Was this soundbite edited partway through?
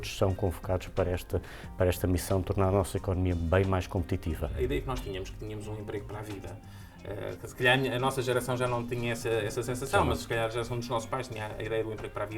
yes; 1 cut; at 4.6 s

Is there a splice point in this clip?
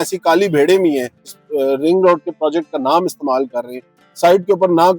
yes; 1 cut; at 1.4 s

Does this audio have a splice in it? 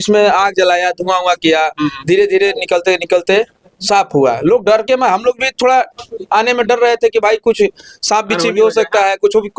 no; 0 cuts

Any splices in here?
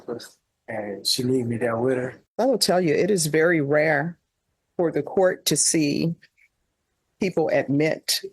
yes; 1 cut; at 2.2 s

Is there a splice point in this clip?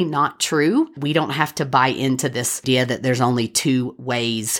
yes; 2 cuts; at 1.0 s, 2.6 s

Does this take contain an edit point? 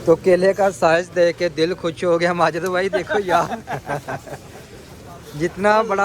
no; 0 cuts

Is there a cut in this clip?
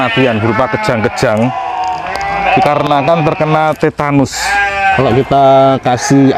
yes; 1 cut; at 5.0 s

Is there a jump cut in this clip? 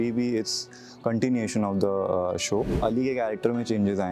yes; 1 cut; at 2.7 s

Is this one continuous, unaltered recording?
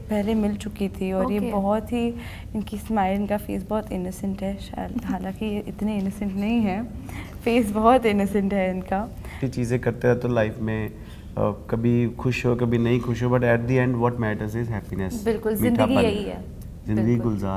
no; 1 cut; at 9.4 s

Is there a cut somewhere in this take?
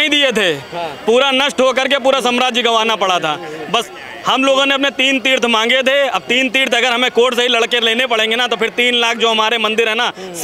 no; 0 cuts

